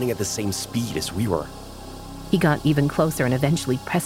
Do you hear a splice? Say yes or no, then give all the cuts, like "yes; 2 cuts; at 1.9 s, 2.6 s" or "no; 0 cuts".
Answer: yes; 1 cut; at 1.6 s